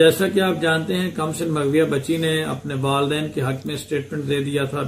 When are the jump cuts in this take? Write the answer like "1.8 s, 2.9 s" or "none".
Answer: none